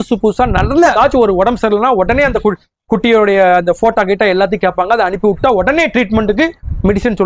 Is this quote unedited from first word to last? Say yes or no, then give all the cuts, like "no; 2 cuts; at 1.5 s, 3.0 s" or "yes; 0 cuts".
no; 1 cut; at 0.9 s